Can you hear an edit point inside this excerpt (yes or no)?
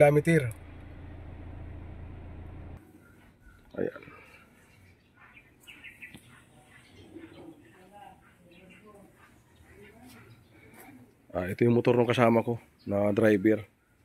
yes